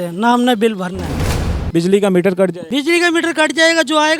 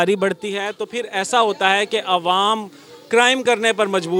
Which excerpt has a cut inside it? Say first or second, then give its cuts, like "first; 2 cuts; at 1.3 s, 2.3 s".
first; 2 cuts; at 1.4 s, 2.6 s